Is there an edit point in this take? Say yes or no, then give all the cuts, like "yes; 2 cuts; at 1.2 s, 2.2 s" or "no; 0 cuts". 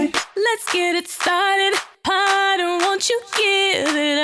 no; 0 cuts